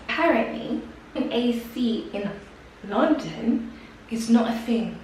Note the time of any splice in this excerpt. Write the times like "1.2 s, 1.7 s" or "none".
1.2 s